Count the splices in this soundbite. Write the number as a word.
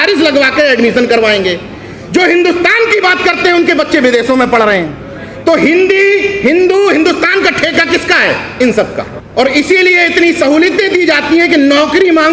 one